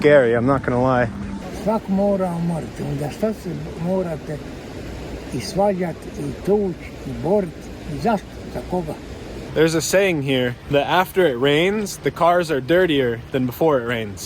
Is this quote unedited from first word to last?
no; 3 cuts; at 1.4 s, 9.4 s, 10.6 s

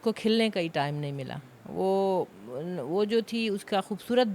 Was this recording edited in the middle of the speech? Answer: no; 0 cuts

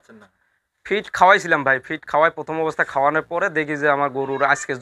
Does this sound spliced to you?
no; 0 cuts

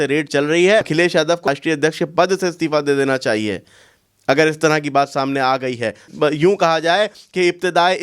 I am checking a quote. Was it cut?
yes; 2 cuts; at 1.3 s, 6.1 s

